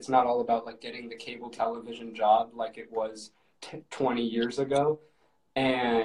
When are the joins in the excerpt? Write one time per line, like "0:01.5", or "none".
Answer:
none